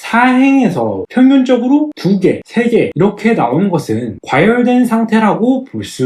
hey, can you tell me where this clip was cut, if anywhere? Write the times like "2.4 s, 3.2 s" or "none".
none